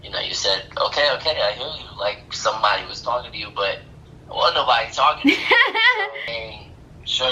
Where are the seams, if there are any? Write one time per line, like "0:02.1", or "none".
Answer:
0:06.2